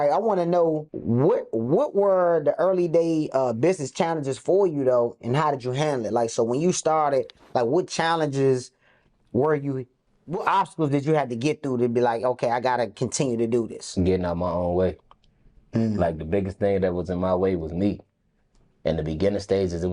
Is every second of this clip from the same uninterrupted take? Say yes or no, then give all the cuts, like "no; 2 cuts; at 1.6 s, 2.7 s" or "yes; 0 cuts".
no; 1 cut; at 0.9 s